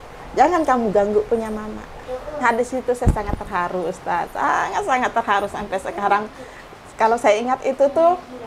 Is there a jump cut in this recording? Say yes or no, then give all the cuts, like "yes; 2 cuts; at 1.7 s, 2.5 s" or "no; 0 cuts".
no; 0 cuts